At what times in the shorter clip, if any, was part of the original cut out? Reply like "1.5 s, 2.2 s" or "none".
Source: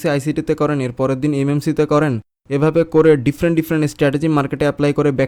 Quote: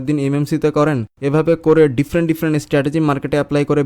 1.1 s